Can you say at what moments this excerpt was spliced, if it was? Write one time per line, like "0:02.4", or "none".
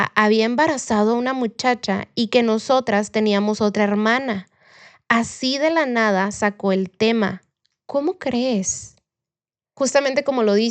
none